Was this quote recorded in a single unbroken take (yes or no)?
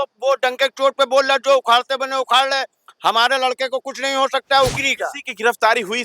no